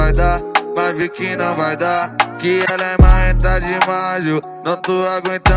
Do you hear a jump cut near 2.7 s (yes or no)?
yes